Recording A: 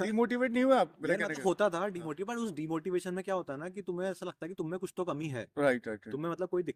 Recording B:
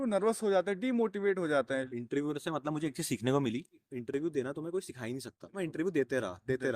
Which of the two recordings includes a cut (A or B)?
B